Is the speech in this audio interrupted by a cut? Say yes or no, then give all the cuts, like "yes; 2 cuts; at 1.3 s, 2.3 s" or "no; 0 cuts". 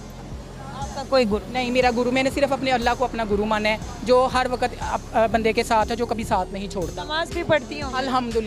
no; 0 cuts